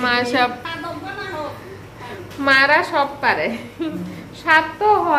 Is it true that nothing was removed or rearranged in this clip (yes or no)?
yes